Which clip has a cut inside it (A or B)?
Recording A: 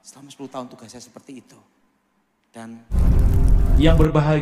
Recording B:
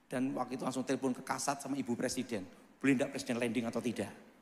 A